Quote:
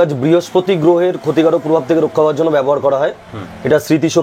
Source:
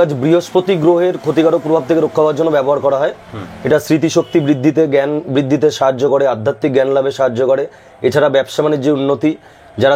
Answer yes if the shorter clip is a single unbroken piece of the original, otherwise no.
yes